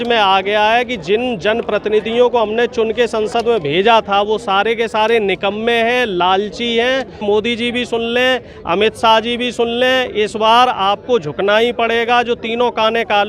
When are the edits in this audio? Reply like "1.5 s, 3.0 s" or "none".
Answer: 7.2 s